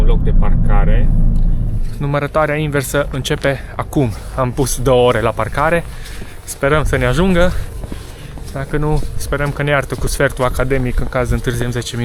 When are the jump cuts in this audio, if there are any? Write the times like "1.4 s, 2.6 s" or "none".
1.8 s

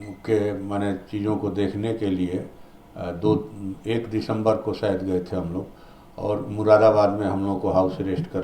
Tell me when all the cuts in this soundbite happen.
none

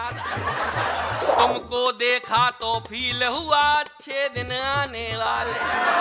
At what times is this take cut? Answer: 1.3 s

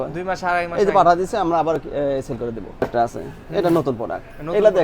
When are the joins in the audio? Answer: 2.8 s

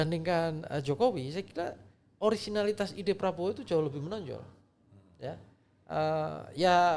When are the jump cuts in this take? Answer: none

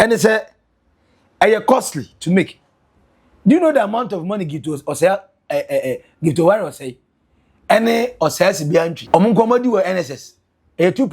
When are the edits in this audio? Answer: 9.0 s

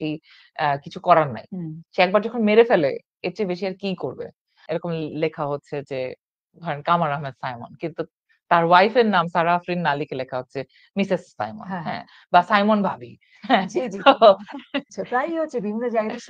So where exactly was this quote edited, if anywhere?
4.6 s, 14.9 s

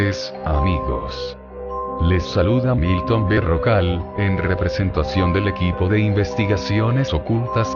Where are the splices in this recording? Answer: 1.5 s

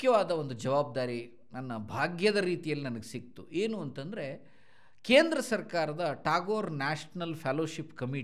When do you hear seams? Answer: none

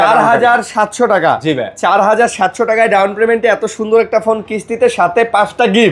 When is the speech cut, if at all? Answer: none

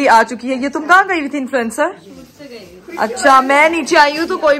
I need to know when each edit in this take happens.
none

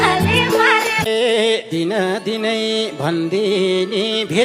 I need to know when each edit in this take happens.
1.1 s

